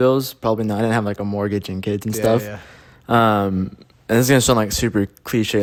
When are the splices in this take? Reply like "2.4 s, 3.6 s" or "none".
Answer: none